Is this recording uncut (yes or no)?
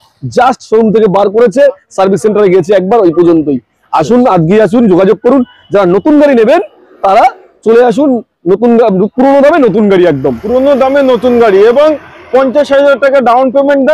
yes